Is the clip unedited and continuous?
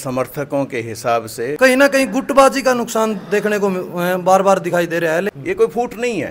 no; 2 cuts; at 1.5 s, 5.4 s

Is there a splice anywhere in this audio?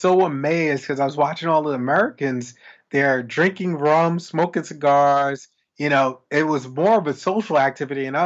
no; 0 cuts

